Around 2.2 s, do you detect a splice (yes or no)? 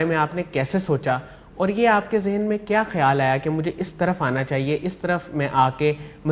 no